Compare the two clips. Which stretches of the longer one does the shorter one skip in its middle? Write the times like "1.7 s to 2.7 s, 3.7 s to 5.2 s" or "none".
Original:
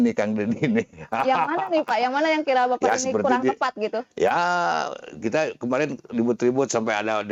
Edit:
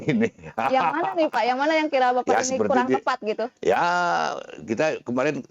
none